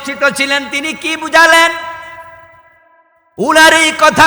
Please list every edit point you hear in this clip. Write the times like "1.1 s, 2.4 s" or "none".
none